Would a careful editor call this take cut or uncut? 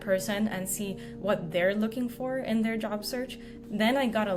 cut